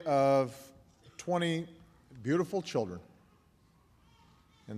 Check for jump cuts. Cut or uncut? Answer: cut